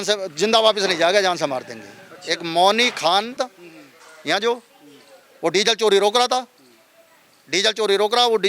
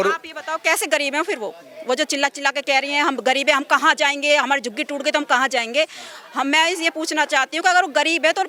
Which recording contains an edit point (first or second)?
first